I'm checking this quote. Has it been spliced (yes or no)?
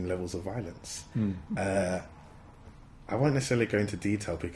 no